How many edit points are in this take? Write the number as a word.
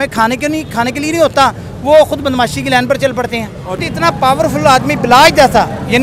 one